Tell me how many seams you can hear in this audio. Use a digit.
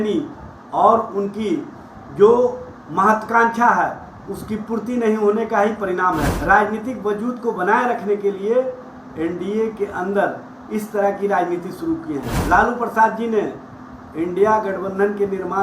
2